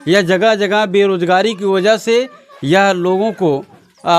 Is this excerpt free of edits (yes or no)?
yes